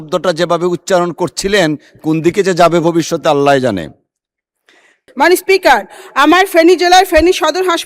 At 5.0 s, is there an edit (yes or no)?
yes